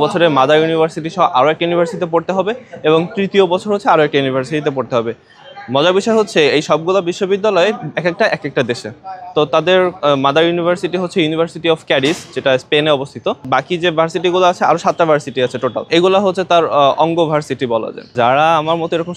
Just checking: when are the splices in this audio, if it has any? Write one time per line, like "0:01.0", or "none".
0:15.9
0:18.0